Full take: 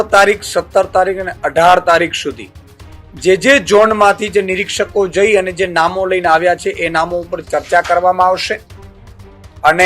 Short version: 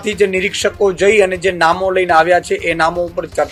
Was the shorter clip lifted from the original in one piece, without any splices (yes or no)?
yes